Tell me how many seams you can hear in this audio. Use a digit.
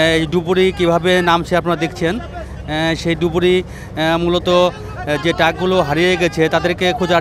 0